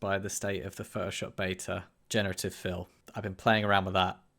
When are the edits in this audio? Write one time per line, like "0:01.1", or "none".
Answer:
0:01.9
0:03.2